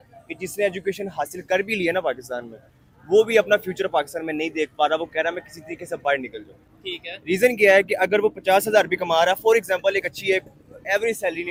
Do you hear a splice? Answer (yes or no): no